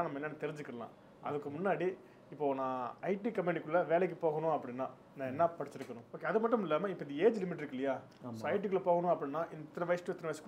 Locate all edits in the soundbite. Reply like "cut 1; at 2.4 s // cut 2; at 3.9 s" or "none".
cut 1; at 6.1 s